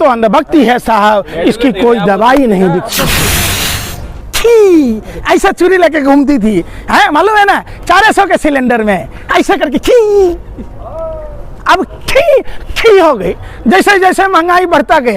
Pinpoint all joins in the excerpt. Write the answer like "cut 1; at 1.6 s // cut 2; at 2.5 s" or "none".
cut 1; at 2.9 s